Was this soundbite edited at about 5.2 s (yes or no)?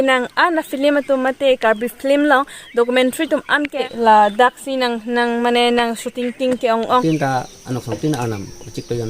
no